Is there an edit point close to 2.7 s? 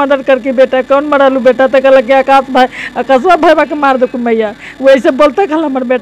no; 0 cuts

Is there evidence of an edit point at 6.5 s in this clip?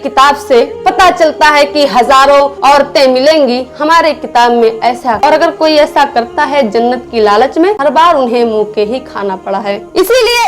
no; 2 cuts; at 5.2 s, 7.8 s

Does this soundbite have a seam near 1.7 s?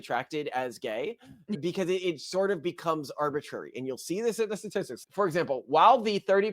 no; 1 cut; at 5.0 s

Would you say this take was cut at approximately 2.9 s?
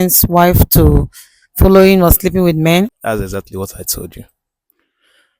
yes; 1 cut; at 2.9 s

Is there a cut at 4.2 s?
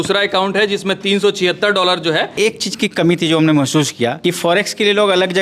yes; 2 cuts; at 2.3 s, 4.2 s

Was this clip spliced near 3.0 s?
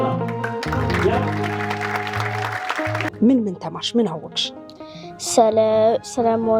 yes; 1 cut; at 3.0 s

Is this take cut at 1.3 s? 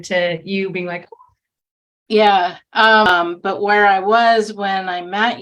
no; 1 cut; at 3.1 s

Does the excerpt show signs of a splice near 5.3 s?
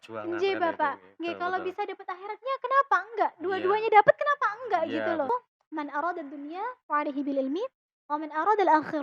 yes; 1 cut; at 5.3 s

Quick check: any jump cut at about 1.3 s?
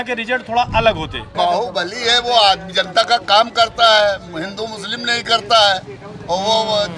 yes; 1 cut; at 1.3 s

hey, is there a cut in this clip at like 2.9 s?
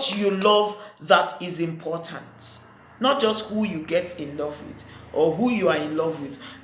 no; 0 cuts

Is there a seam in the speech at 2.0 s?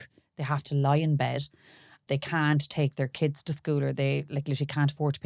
yes; 1 cut; at 2.0 s

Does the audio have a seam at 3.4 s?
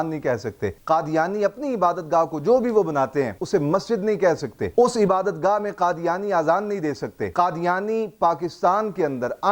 yes; 1 cut; at 3.4 s

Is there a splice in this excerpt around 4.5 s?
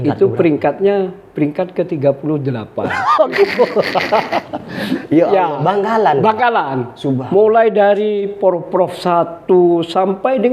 no; 0 cuts

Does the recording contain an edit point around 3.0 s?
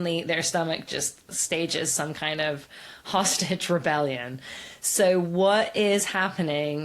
no; 0 cuts

